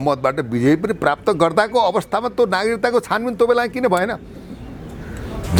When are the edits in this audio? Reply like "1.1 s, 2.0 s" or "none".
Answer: none